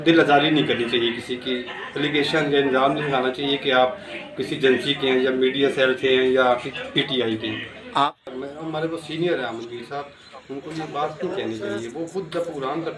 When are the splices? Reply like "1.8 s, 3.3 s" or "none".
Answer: 8.1 s

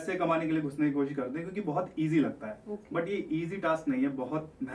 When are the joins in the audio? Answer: none

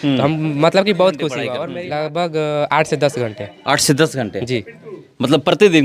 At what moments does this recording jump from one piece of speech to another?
1.6 s

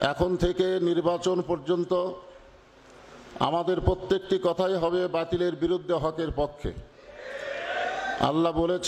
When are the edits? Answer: none

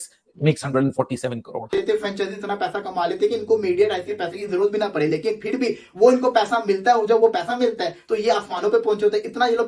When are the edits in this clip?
1.7 s

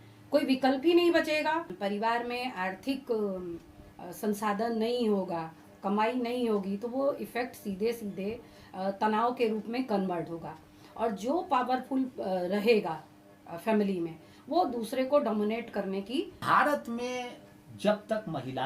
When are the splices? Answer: 1.7 s, 16.4 s

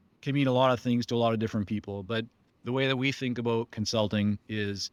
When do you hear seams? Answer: none

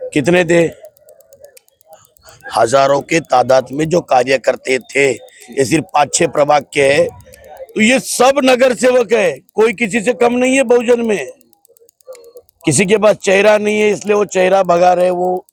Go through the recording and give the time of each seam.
none

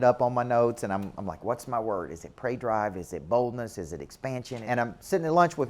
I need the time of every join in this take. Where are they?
4.6 s

